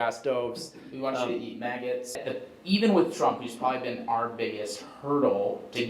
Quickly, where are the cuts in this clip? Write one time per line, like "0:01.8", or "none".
0:02.2